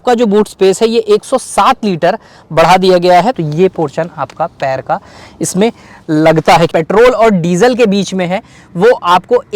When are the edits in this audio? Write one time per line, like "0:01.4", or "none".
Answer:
0:03.3
0:06.7